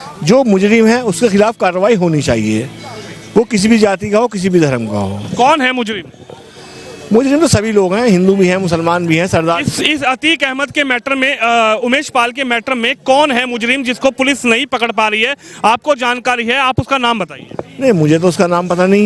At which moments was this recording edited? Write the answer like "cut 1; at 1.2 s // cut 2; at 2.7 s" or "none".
none